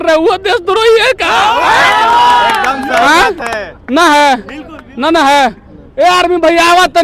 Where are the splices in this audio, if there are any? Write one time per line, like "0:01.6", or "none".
none